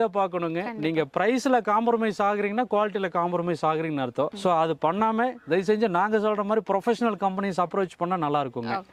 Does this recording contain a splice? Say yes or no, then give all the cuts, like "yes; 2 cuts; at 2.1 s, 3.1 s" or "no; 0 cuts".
no; 0 cuts